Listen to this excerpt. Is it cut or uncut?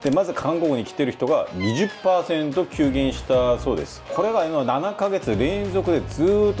uncut